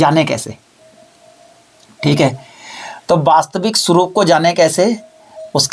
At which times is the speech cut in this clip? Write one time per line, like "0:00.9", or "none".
none